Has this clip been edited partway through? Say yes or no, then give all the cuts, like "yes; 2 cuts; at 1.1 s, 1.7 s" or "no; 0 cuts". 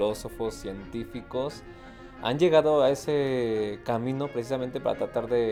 no; 0 cuts